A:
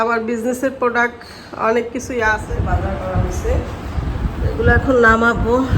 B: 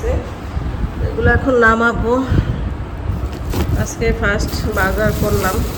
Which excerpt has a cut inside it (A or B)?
A